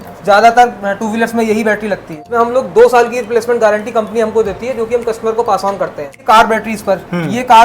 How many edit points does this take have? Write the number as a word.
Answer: two